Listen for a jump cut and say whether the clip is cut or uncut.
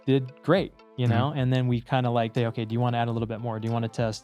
cut